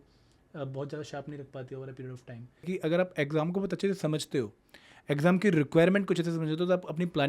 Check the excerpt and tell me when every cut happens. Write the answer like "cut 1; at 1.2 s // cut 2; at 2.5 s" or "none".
cut 1; at 2.6 s